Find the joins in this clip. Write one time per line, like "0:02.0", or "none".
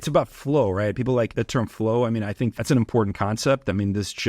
0:01.3
0:02.5